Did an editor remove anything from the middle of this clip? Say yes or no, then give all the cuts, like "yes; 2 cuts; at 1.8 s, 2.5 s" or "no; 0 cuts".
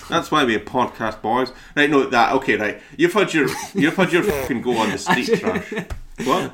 no; 0 cuts